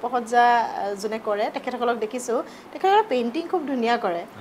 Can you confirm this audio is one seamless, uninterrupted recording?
yes; 0 cuts

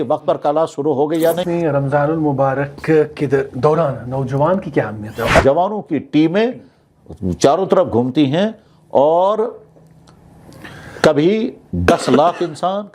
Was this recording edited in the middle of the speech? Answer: yes; 2 cuts; at 1.4 s, 5.4 s

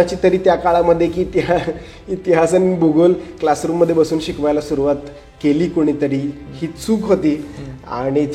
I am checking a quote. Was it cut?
no; 0 cuts

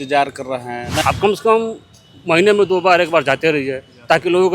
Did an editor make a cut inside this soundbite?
yes; 1 cut; at 1.0 s

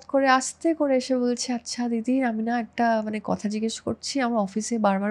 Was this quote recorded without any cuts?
yes; 0 cuts

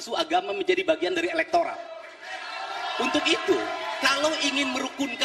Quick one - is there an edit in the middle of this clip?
no; 0 cuts

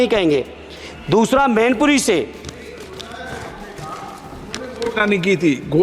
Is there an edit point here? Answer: no; 0 cuts

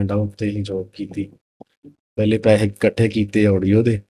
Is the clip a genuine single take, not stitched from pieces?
yes; 0 cuts

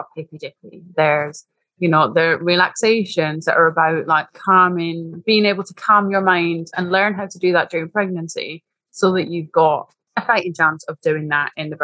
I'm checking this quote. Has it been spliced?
yes; 1 cut; at 10.0 s

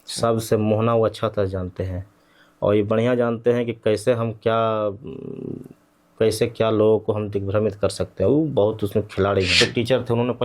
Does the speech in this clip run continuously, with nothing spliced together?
no; 1 cut; at 9.5 s

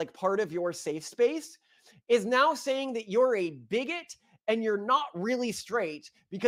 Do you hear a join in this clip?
no; 0 cuts

